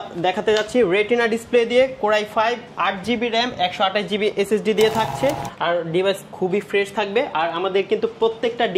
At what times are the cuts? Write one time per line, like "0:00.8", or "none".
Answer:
0:05.5